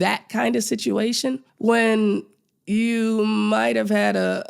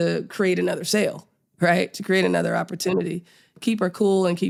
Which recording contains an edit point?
first; 1 cut; at 1.5 s

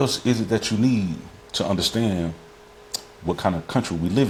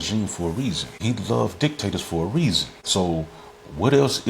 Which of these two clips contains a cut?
second; 2 cuts; at 0.9 s, 2.7 s

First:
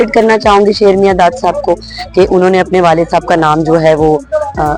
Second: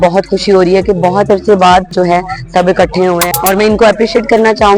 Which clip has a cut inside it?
second; 2 cuts; at 1.9 s, 3.2 s

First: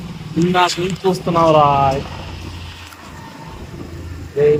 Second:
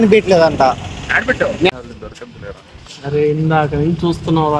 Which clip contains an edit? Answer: second; 1 cut; at 1.7 s

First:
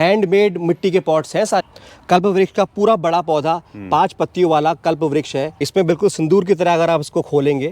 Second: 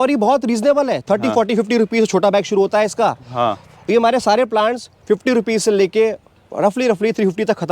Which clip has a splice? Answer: first; 2 cuts; at 1.6 s, 5.6 s

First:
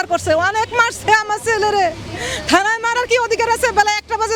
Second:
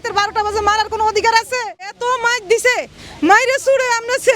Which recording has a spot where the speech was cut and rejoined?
second; 1 cut; at 2.0 s

